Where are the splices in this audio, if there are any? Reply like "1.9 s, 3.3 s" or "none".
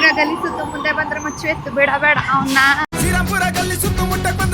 none